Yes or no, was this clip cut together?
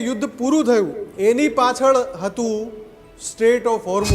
yes